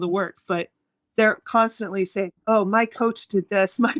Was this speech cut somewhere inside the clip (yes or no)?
no